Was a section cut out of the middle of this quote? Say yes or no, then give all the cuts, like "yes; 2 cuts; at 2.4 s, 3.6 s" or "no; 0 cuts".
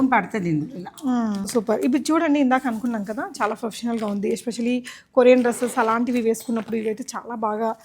yes; 1 cut; at 1.5 s